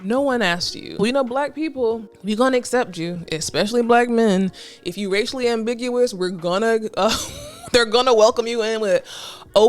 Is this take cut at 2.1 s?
yes; 2 cuts; at 1.0 s, 2.1 s

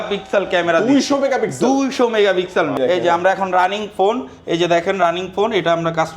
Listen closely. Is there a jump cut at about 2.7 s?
yes; 1 cut; at 2.7 s

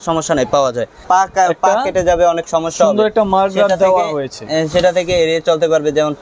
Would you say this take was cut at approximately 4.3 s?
no; 1 cut; at 0.9 s

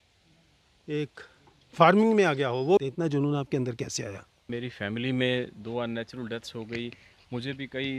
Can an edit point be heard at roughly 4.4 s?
yes; 2 cuts; at 2.8 s, 4.4 s

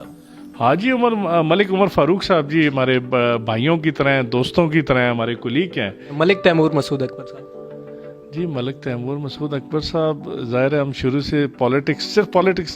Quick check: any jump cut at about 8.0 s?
no; 1 cut; at 6.1 s

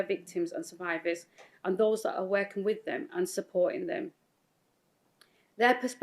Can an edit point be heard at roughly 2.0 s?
yes; 1 cut; at 2.0 s

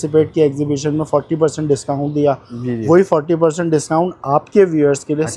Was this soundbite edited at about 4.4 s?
no; 0 cuts

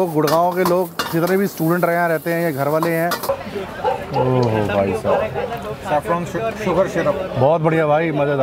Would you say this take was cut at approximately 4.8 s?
no; 1 cut; at 3.2 s

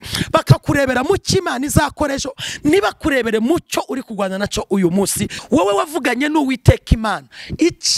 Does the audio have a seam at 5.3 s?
yes; 1 cut; at 5.3 s

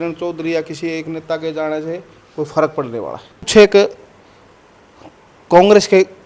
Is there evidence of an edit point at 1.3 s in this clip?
no; 1 cut; at 3.5 s

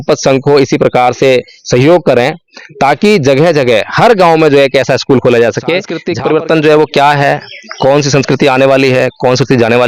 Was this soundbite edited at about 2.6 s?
no; 1 cut; at 6.0 s

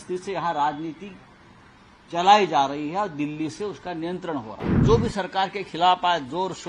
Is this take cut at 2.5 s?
no; 1 cut; at 4.8 s

